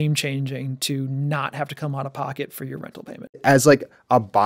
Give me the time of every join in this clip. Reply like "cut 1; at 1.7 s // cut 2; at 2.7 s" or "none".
cut 1; at 3.4 s